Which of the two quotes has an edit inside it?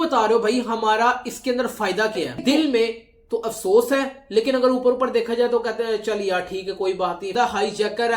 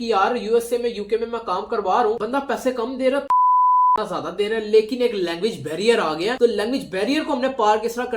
first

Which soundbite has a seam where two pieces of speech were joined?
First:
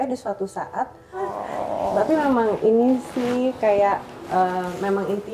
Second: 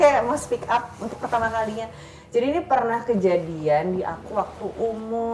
first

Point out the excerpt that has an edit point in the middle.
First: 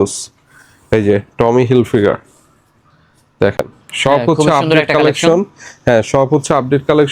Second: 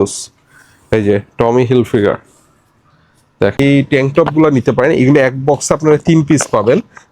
second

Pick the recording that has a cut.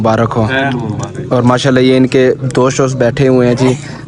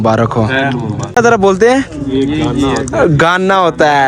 second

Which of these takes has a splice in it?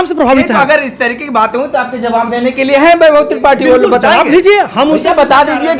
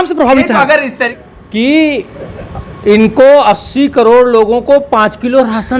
second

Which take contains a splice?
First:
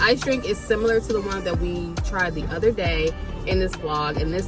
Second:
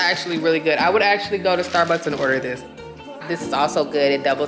second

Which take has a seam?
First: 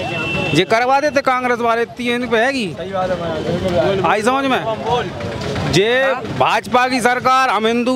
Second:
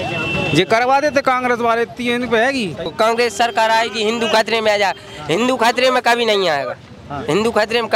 second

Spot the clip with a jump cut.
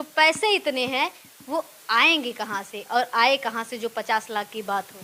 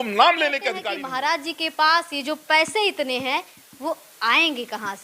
second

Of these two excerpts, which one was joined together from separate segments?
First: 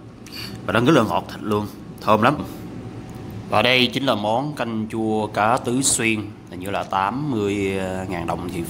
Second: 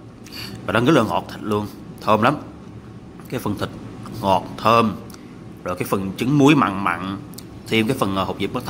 first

